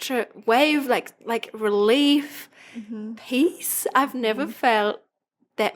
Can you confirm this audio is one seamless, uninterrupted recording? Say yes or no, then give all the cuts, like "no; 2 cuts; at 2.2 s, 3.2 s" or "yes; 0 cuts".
yes; 0 cuts